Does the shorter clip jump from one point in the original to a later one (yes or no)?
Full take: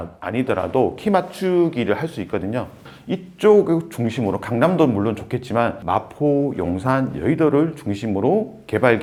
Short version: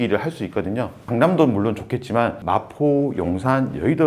yes